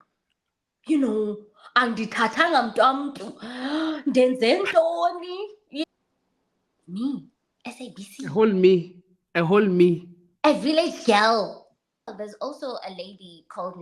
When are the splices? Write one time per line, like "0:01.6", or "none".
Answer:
0:05.9
0:12.2

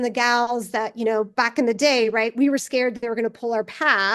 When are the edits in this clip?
none

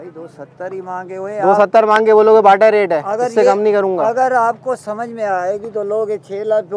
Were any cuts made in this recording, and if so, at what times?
none

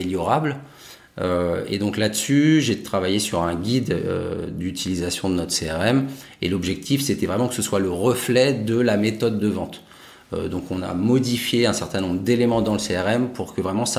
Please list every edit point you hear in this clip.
none

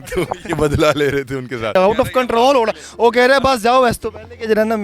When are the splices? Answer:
0:01.7

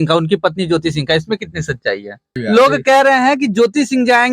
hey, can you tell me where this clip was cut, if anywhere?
0:02.3

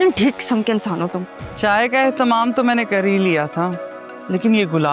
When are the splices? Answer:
0:01.4

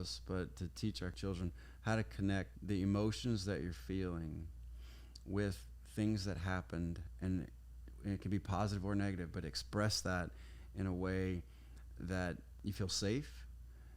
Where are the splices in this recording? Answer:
0:01.2
0:02.5
0:12.5

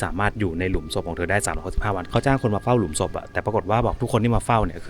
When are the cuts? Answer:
0:02.0

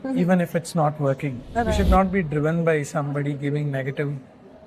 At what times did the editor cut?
0:01.7

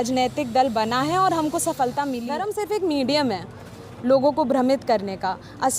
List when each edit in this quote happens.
0:02.3

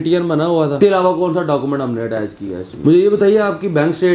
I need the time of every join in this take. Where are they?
0:00.8
0:02.6

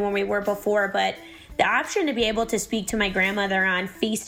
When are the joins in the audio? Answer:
none

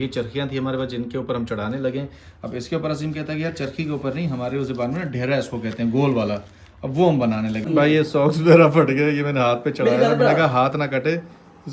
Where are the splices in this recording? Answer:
0:07.6

